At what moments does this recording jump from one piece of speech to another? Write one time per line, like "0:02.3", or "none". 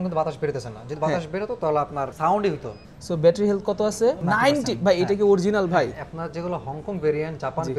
0:02.1
0:02.8
0:04.2

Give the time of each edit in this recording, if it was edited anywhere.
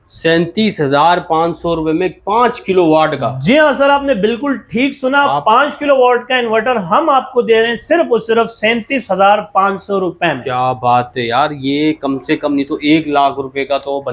none

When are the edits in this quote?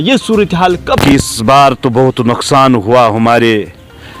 0:01.0

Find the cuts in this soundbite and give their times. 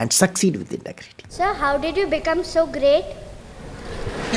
0:01.3

